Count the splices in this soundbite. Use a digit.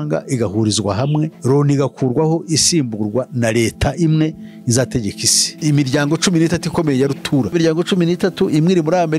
3